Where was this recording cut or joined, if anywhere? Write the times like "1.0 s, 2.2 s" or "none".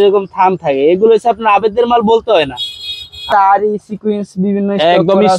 3.2 s